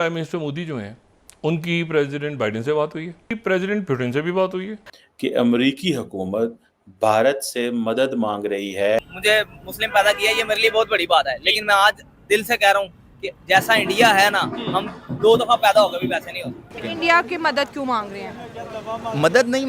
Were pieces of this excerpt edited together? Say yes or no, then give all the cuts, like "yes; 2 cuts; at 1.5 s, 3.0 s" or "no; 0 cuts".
yes; 3 cuts; at 3.4 s, 9.0 s, 16.6 s